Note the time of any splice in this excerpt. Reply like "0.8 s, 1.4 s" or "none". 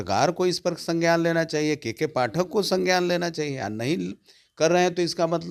none